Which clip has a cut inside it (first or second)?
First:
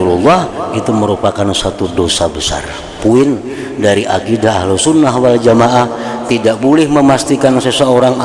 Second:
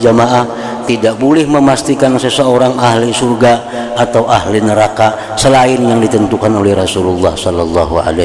first